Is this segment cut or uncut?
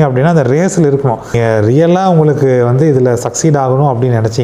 cut